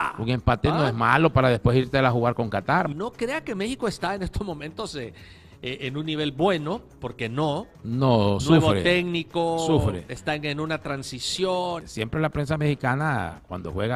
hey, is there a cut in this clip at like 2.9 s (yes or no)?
yes